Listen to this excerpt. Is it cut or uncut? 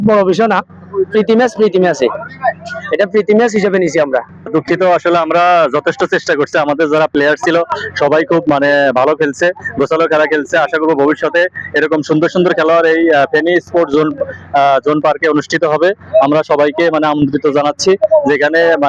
uncut